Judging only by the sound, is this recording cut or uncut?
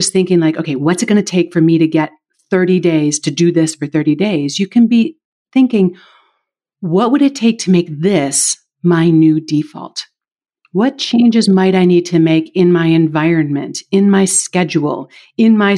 uncut